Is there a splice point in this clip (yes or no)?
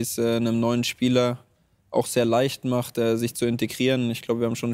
no